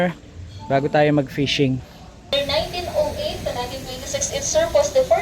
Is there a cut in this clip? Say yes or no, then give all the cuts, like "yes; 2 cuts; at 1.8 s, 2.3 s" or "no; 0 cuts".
yes; 1 cut; at 2.3 s